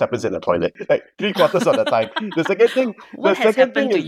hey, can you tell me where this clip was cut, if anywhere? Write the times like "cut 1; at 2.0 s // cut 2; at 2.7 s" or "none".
none